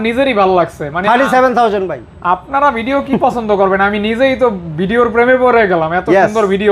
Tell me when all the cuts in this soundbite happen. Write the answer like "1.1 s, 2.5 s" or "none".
none